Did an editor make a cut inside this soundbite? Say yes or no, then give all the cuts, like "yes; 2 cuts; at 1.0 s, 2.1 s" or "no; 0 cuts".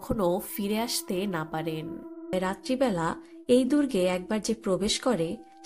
yes; 1 cut; at 2.3 s